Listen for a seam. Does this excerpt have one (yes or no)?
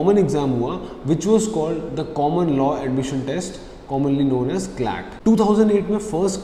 no